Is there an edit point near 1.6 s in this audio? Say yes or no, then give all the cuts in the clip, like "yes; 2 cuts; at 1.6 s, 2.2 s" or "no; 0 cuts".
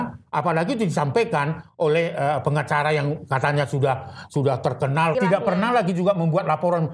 no; 1 cut; at 5.1 s